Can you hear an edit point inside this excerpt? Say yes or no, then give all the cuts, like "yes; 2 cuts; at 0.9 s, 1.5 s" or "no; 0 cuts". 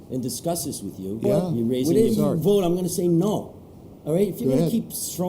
yes; 1 cut; at 1.8 s